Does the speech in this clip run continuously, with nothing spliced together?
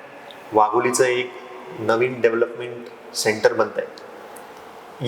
yes; 0 cuts

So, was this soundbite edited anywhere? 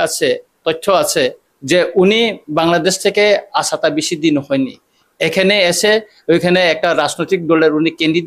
yes; 1 cut; at 1.5 s

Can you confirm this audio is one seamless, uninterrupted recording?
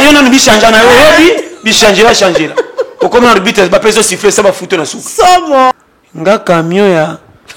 no; 1 cut; at 5.7 s

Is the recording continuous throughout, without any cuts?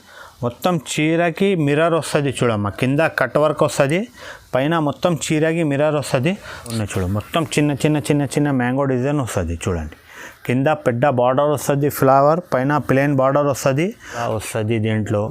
no; 2 cuts; at 6.7 s, 14.2 s

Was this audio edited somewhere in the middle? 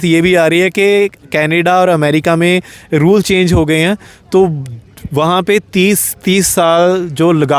no; 0 cuts

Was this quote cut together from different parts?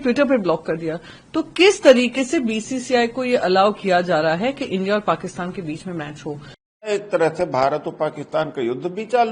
yes; 1 cut; at 6.8 s

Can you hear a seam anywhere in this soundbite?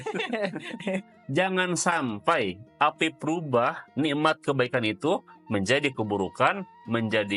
yes; 1 cut; at 1.1 s

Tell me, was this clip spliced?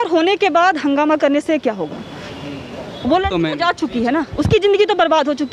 no; 0 cuts

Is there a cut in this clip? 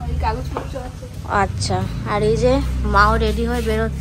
no; 0 cuts

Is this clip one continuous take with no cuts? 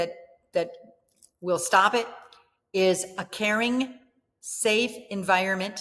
yes; 0 cuts

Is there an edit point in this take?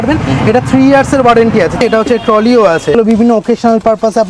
yes; 2 cuts; at 1.8 s, 2.9 s

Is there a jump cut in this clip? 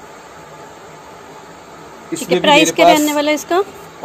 no; 0 cuts

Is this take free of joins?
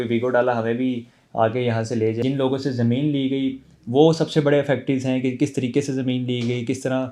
no; 1 cut; at 2.2 s

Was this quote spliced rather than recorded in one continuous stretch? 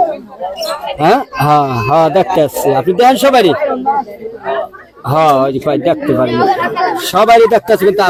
no; 0 cuts

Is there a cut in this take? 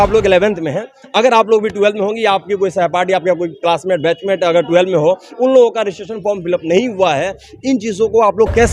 no; 0 cuts

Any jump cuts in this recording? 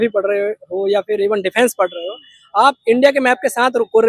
no; 0 cuts

